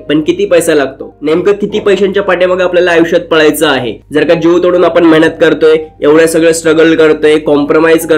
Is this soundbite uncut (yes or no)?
yes